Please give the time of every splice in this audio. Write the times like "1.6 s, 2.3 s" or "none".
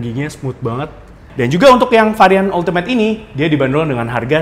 1.2 s